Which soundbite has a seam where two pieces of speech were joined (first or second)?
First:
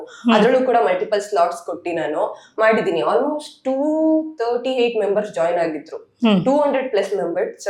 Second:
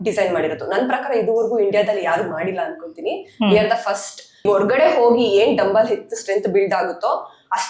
second